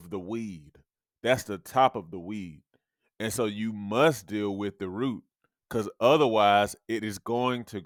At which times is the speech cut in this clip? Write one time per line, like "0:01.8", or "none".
none